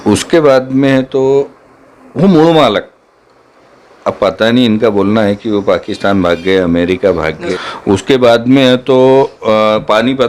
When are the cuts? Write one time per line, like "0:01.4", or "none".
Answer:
0:07.4

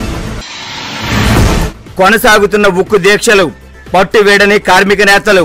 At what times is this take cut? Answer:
none

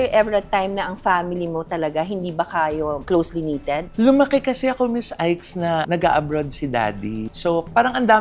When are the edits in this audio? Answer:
0:07.2

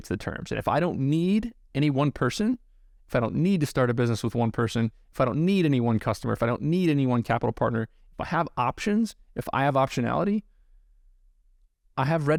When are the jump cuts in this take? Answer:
none

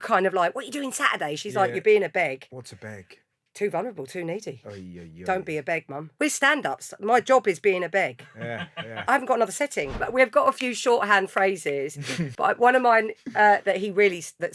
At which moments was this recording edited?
0:02.6
0:06.0
0:09.0
0:10.0
0:12.2

